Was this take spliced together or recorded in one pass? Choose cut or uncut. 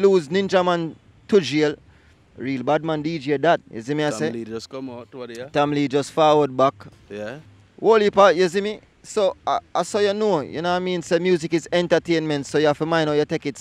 uncut